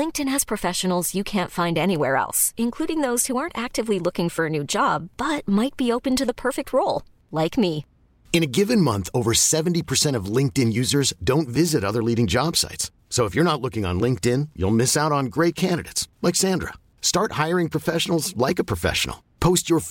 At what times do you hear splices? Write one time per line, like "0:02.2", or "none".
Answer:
none